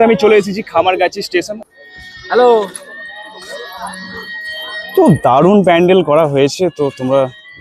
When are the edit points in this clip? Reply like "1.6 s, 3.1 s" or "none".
1.6 s